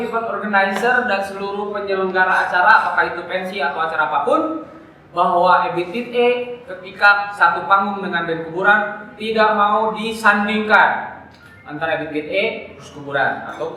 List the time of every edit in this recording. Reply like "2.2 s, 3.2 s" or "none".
none

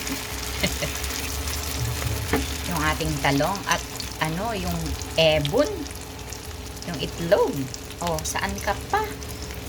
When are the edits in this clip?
none

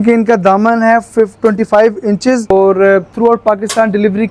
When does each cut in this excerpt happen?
2.5 s

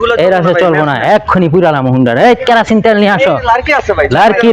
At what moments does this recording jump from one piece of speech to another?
none

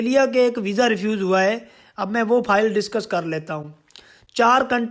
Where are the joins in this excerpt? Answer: none

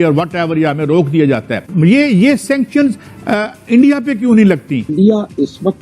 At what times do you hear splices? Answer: 4.9 s

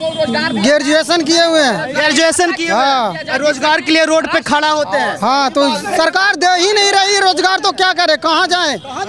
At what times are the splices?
none

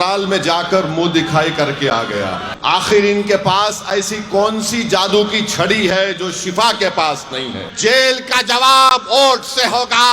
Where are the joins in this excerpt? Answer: 2.5 s, 7.6 s

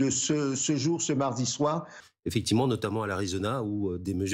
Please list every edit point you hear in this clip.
2.0 s

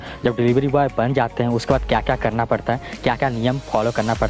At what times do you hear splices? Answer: none

